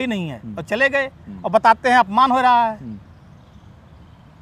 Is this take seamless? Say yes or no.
yes